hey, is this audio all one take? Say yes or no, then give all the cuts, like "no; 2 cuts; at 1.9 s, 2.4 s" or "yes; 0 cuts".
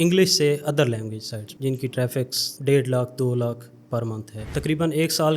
no; 2 cuts; at 1.4 s, 4.4 s